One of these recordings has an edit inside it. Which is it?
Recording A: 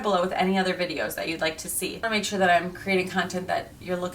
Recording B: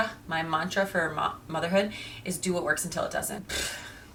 A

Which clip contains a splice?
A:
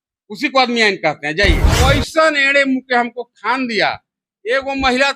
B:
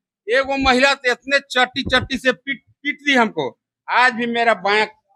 A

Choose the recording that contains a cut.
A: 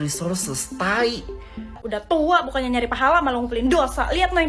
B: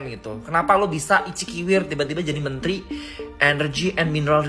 A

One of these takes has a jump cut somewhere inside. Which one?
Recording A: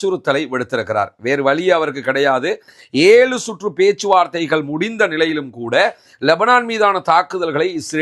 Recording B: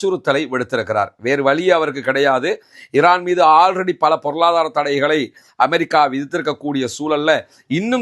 A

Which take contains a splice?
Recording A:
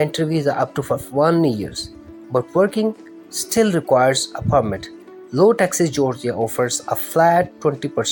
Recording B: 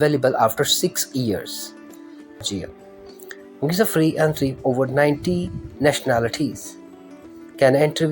B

